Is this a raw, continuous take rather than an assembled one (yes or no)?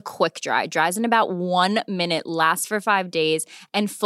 yes